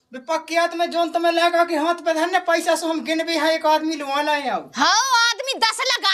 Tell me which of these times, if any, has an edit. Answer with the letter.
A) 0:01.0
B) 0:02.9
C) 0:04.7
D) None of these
D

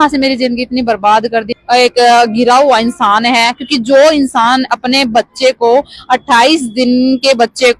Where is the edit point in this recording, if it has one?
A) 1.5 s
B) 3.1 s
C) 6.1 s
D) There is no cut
A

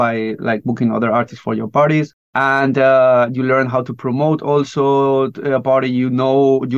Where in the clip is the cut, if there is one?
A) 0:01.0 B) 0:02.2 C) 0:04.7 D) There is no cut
B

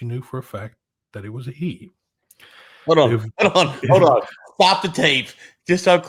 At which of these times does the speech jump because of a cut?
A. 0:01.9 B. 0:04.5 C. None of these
C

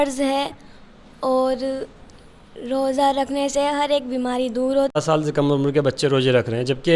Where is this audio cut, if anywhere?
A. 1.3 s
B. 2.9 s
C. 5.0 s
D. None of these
C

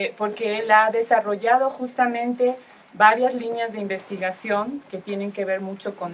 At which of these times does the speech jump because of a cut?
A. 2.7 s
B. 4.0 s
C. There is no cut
B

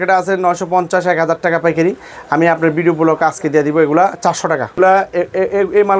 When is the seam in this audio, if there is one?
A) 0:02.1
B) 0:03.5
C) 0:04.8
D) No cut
C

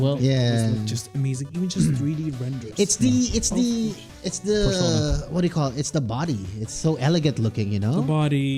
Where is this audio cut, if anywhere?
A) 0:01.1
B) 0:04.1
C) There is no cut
C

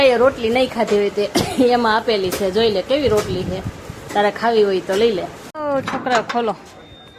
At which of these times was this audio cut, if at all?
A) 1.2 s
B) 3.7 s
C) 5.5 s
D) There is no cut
C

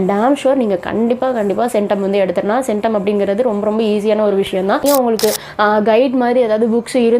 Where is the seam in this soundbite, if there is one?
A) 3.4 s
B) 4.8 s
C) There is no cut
B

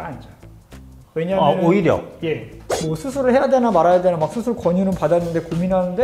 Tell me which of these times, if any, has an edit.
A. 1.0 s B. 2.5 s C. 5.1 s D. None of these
B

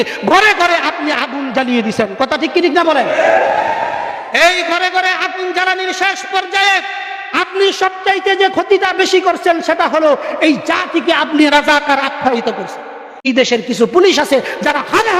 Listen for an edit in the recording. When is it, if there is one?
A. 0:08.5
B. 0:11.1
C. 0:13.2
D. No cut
C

